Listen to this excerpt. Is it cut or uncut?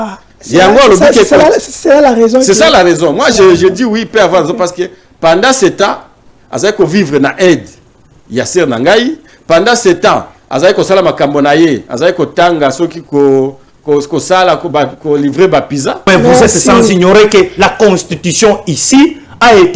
cut